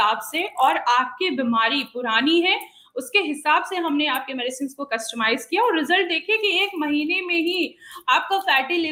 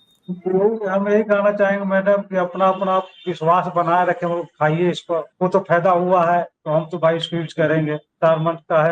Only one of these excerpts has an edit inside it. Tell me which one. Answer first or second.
second